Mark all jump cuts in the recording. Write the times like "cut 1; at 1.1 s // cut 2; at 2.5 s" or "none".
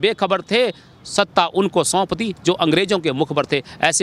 none